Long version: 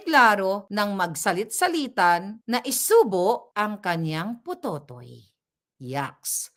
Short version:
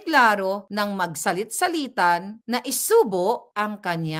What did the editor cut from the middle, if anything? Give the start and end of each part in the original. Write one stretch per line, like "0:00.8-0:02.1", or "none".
none